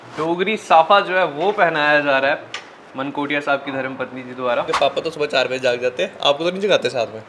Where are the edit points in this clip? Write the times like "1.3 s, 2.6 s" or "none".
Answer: 4.7 s